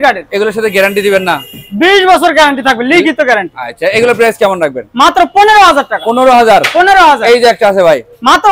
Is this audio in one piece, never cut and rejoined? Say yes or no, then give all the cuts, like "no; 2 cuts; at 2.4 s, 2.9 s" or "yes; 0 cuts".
yes; 0 cuts